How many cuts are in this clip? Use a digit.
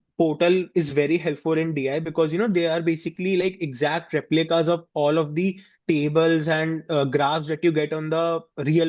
0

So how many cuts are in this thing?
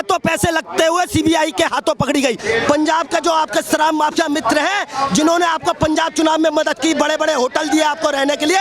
1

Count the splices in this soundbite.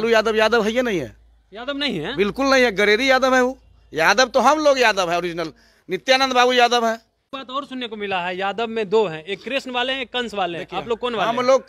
1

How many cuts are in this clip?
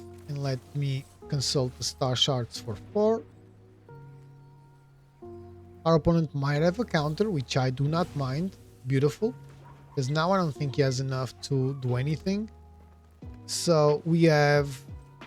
2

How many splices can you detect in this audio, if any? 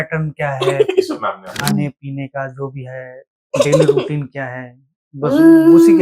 0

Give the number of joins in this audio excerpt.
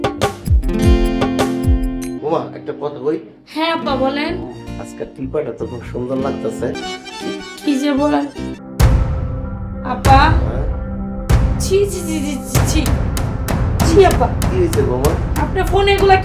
2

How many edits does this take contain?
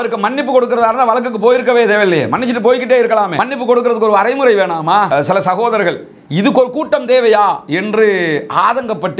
1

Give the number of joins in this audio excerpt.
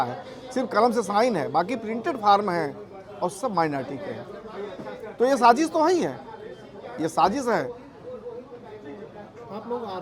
0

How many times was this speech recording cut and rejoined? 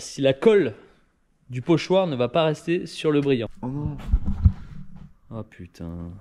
1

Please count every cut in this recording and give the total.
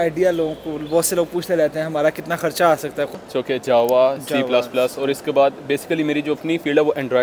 1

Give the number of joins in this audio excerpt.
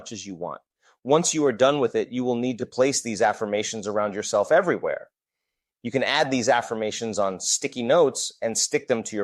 1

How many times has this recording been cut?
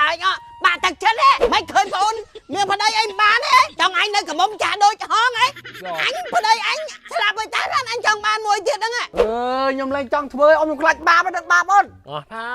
4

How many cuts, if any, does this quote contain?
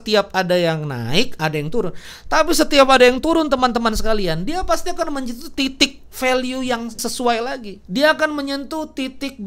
2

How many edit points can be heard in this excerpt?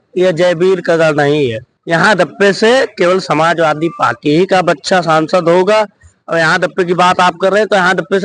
1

